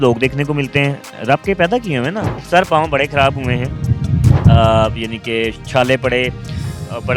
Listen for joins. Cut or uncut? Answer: cut